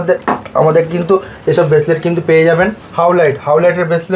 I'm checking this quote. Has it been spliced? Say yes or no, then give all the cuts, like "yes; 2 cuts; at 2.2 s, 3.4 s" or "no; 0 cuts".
yes; 1 cut; at 2.8 s